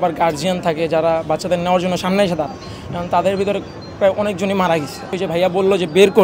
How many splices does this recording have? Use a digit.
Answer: 1